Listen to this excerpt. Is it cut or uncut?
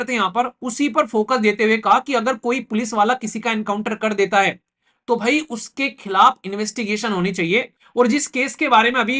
cut